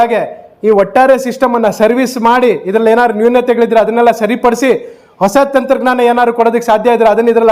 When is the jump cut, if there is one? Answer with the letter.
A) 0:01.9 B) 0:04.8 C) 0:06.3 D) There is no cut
D